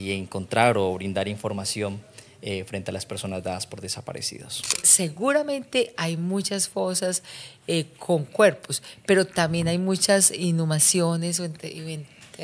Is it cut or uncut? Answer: cut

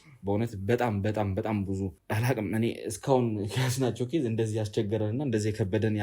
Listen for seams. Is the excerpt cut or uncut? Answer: cut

